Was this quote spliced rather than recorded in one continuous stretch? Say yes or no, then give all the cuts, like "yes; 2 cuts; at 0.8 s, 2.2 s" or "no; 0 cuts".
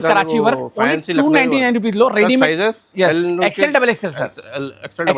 no; 0 cuts